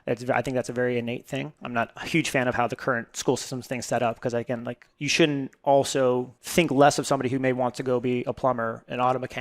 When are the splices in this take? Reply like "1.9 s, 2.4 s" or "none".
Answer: 1.6 s, 6.4 s